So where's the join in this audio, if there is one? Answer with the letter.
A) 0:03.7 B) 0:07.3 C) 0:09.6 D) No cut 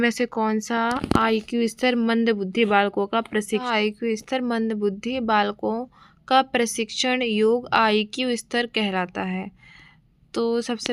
A